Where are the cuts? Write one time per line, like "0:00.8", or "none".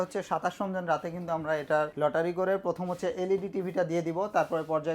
0:01.9